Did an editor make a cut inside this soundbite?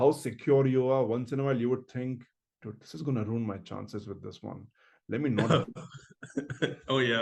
no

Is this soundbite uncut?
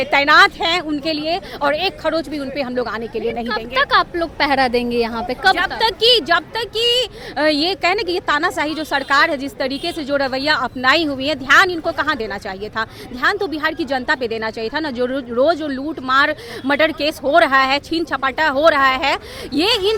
yes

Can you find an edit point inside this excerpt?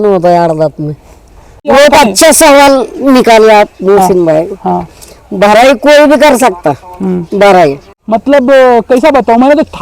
yes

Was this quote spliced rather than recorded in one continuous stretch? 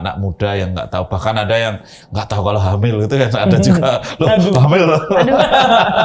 no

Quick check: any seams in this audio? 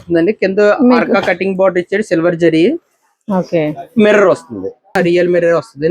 yes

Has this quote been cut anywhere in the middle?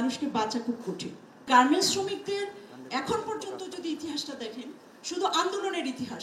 yes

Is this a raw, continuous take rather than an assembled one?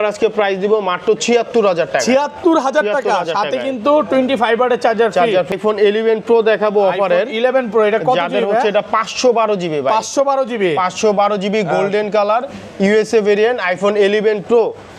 no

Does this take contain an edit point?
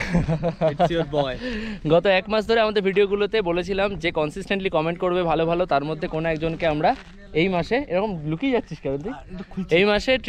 no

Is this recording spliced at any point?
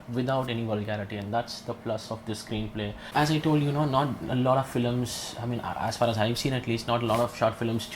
yes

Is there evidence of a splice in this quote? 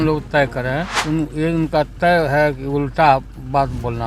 yes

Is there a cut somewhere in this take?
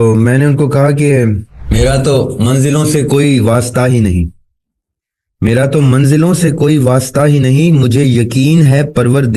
yes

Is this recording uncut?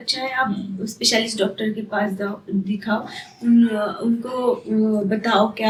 yes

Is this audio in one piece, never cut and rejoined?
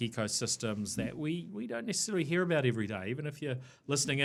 yes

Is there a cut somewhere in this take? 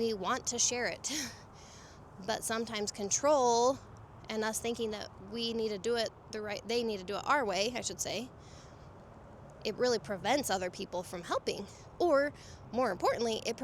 no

